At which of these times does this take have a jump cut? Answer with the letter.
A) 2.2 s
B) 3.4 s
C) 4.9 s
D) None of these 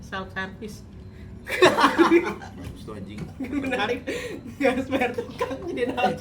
D